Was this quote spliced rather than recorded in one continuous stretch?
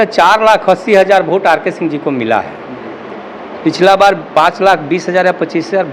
no; 0 cuts

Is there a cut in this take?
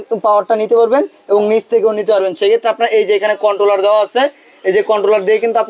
no; 0 cuts

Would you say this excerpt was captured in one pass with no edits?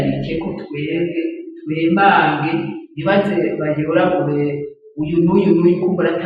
yes; 0 cuts

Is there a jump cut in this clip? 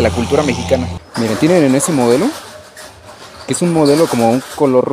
yes; 1 cut; at 1.0 s

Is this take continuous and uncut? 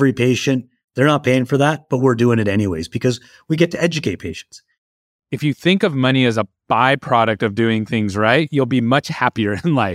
no; 1 cut; at 4.8 s

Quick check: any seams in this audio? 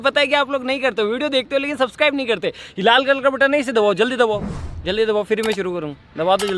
no; 0 cuts

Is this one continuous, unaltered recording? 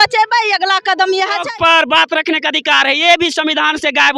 no; 1 cut; at 1.5 s

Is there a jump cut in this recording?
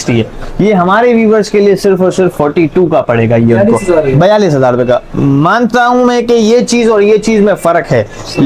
no; 0 cuts

